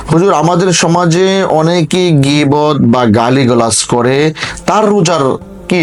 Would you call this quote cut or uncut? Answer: uncut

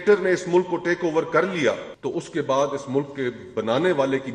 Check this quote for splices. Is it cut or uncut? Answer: cut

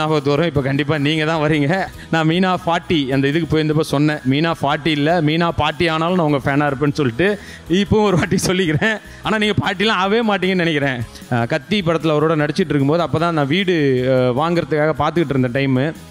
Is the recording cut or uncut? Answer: cut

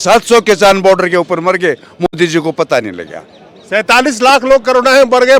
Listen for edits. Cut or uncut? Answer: uncut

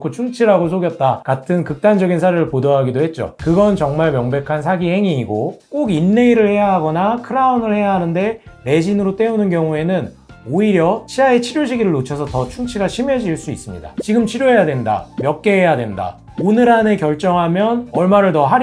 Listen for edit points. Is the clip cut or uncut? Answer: cut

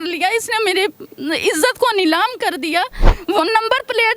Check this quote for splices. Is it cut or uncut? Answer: cut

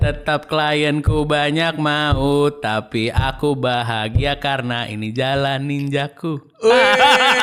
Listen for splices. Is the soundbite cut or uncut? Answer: uncut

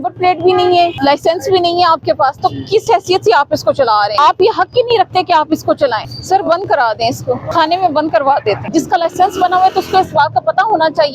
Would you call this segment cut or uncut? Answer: cut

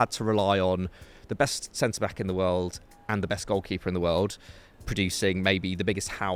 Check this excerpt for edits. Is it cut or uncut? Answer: uncut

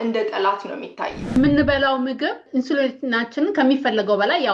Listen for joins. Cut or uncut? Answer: cut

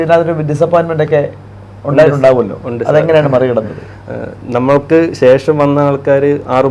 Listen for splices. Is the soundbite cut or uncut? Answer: uncut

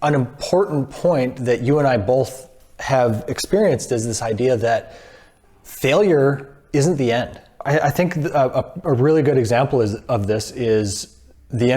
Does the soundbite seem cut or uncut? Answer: cut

